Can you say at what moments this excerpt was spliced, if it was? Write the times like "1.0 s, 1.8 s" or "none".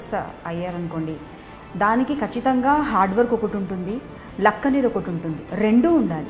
none